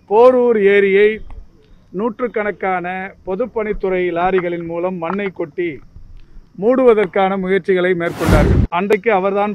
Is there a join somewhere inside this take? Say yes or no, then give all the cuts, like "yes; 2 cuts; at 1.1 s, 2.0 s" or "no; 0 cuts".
yes; 1 cut; at 8.6 s